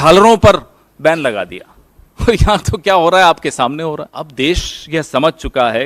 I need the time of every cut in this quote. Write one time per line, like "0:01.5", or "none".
0:04.2